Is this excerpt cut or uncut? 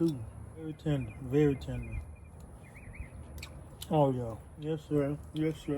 cut